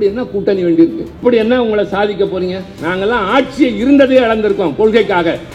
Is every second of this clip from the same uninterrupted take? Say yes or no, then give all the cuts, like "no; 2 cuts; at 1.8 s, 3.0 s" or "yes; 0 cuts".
no; 1 cut; at 1.1 s